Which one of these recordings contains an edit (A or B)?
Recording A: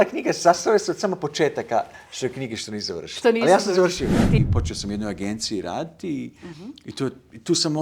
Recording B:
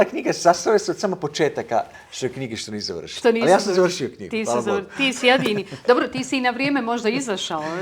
A